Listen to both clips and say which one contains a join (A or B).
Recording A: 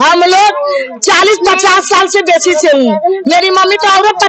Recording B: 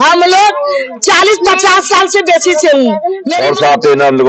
B